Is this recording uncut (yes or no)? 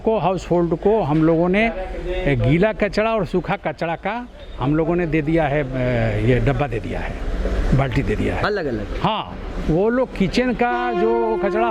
yes